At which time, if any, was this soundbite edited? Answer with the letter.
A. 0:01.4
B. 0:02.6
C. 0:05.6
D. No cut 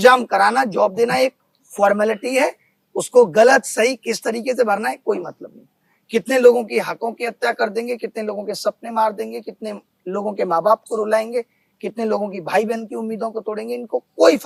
D